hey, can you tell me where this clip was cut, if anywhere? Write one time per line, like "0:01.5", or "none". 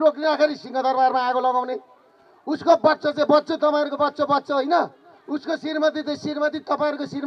none